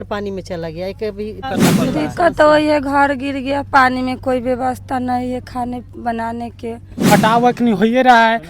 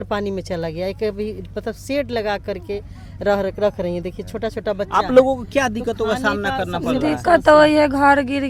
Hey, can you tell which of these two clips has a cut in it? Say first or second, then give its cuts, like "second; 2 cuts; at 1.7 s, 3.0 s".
first; 2 cuts; at 1.5 s, 7.1 s